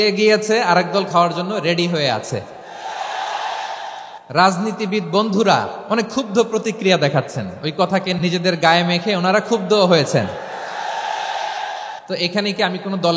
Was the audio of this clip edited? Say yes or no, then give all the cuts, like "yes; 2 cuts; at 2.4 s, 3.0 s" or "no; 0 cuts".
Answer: yes; 4 cuts; at 4.1 s, 5.8 s, 8.1 s, 12.0 s